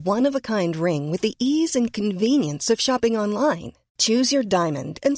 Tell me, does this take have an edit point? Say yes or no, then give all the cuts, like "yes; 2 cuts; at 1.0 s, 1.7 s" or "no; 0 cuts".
no; 0 cuts